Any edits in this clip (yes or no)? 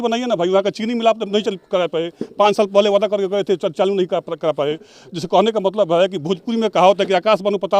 no